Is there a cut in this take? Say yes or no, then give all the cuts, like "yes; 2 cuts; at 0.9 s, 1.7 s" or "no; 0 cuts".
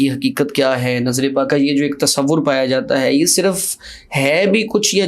yes; 1 cut; at 1.5 s